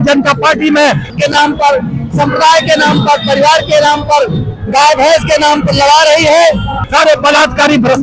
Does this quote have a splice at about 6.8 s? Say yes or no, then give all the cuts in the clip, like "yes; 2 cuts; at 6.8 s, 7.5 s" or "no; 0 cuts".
yes; 2 cuts; at 1.1 s, 6.8 s